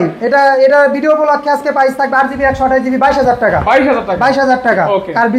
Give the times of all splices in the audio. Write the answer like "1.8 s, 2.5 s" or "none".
none